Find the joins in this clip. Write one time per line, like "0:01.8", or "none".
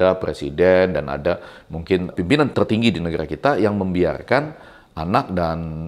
0:02.5